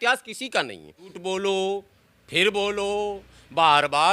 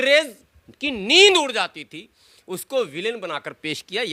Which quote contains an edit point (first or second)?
first